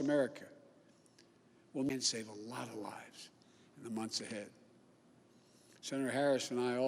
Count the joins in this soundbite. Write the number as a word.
one